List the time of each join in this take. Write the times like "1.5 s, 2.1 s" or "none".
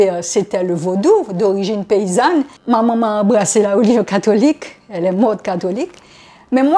2.5 s